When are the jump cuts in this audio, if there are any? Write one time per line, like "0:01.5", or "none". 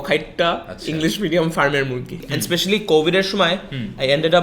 0:02.2

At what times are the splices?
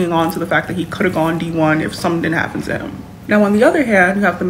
0:02.0

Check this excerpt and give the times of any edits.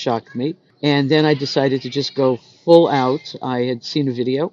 none

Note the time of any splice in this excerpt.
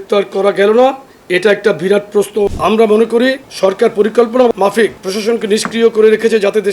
0:02.5
0:03.5
0:04.5

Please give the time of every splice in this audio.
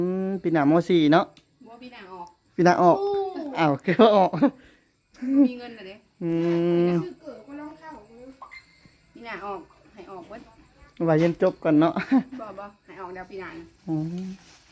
none

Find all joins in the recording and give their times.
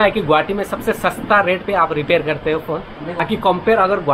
0:03.2

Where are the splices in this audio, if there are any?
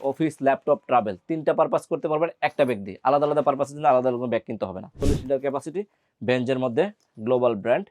0:05.0

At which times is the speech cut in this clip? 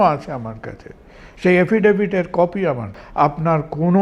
0:03.0

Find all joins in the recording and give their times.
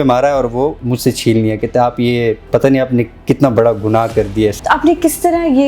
0:00.9
0:02.4
0:04.6

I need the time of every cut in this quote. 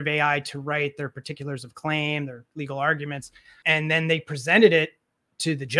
0:03.5

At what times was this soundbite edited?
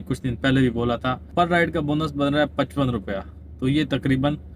0:01.3

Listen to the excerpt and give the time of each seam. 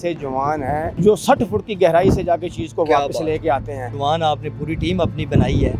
0:00.9
0:03.8

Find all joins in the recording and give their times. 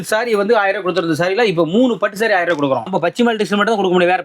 0:02.9

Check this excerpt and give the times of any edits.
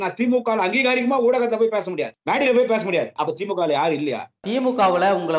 0:02.2
0:03.1
0:04.4

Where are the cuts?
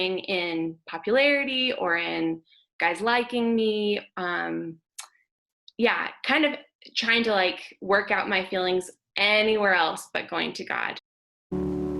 0:11.0

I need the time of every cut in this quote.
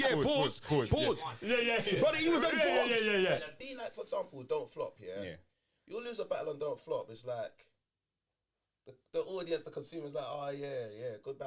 0:03.5

